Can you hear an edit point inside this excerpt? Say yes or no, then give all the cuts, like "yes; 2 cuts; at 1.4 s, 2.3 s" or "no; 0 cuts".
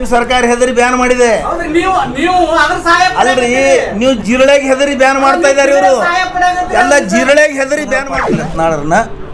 yes; 1 cut; at 8.2 s